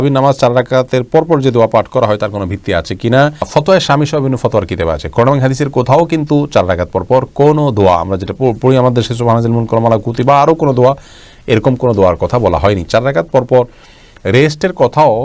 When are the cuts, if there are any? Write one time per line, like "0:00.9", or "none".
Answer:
none